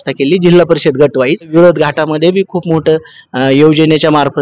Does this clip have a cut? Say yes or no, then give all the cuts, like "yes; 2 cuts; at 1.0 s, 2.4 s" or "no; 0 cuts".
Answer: yes; 1 cut; at 1.5 s